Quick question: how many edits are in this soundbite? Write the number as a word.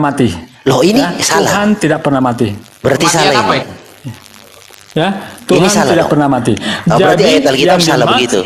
zero